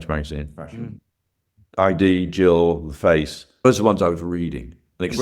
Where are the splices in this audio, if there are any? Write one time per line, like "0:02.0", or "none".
0:01.8